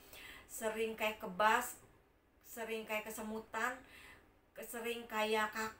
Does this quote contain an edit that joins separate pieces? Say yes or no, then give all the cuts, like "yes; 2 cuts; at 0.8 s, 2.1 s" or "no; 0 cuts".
no; 0 cuts